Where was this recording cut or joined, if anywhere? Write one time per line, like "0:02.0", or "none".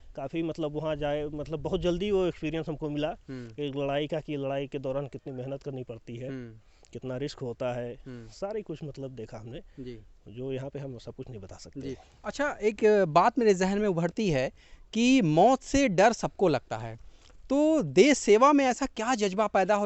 none